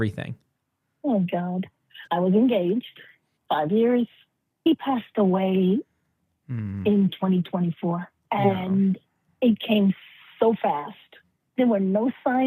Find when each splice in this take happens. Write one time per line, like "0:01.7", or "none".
0:08.2
0:11.5